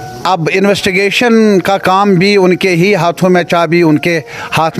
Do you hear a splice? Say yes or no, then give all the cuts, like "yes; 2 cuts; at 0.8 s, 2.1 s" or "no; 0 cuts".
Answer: no; 0 cuts